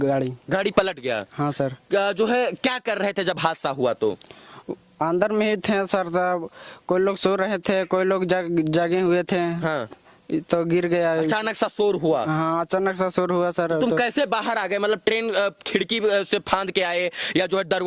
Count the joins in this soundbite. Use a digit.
0